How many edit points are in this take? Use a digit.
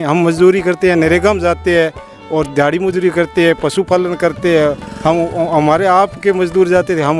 0